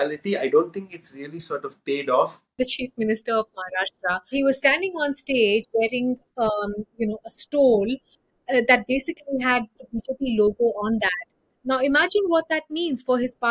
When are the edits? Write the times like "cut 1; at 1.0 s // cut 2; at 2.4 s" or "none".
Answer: cut 1; at 2.5 s // cut 2; at 4.3 s